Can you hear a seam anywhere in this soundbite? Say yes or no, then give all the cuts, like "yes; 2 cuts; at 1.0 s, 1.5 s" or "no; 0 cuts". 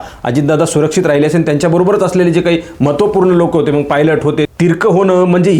yes; 1 cut; at 4.5 s